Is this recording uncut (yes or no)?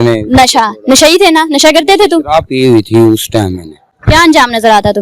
no